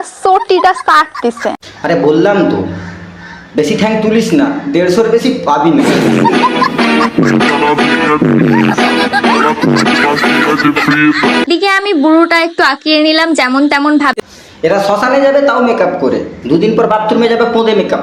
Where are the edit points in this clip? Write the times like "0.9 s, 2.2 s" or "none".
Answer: 1.5 s, 11.5 s